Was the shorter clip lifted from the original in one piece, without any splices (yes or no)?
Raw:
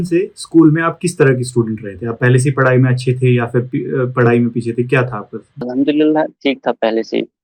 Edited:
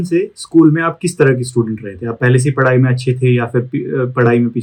yes